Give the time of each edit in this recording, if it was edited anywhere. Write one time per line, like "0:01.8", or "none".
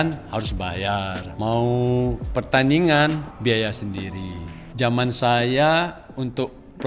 0:01.2
0:02.2
0:03.3
0:04.6